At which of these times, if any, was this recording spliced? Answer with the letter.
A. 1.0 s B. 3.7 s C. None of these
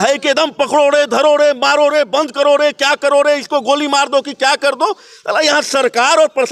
C